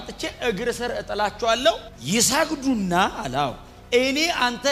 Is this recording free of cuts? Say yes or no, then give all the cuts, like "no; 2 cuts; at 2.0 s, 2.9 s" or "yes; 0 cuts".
yes; 0 cuts